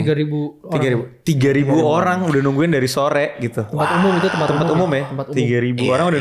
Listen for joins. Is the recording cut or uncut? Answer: uncut